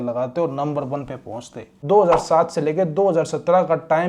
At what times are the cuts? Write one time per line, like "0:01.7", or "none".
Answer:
0:01.8